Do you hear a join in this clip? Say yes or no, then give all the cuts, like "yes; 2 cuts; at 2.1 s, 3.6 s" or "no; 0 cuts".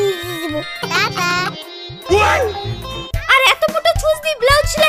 yes; 2 cuts; at 0.8 s, 3.2 s